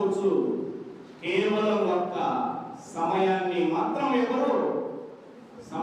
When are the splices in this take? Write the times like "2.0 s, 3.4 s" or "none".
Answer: none